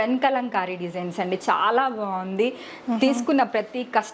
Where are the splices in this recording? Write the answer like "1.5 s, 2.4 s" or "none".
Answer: none